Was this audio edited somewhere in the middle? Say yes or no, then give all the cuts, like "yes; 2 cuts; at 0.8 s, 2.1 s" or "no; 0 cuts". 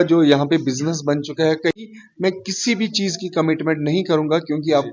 yes; 1 cut; at 1.8 s